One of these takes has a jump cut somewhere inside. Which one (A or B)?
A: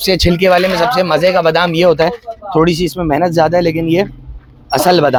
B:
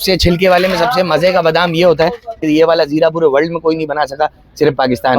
B